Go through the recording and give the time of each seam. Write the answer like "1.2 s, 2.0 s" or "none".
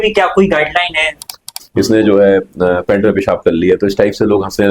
1.4 s